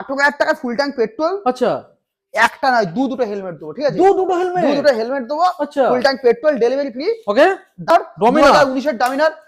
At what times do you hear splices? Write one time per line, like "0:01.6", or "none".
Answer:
0:07.9